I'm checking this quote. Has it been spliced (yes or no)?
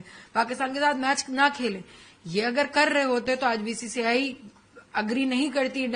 no